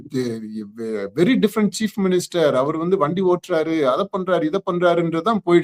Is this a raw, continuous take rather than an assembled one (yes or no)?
yes